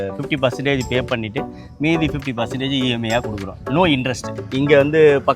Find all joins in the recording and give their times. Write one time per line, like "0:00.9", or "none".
0:04.3